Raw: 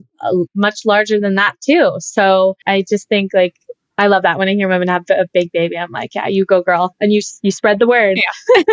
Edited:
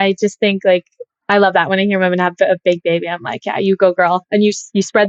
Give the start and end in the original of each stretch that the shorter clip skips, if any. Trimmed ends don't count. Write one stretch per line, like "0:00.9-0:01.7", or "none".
none